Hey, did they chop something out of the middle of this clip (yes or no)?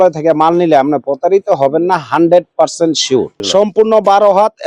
yes